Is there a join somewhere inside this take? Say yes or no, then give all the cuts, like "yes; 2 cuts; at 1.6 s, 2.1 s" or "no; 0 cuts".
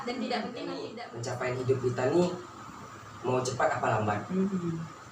yes; 1 cut; at 0.9 s